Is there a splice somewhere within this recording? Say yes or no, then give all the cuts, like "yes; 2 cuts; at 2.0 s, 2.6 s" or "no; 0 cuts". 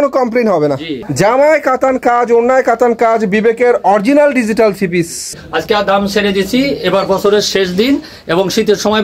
yes; 2 cuts; at 1.0 s, 5.4 s